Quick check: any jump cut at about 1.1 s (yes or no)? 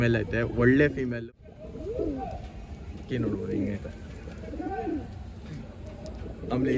yes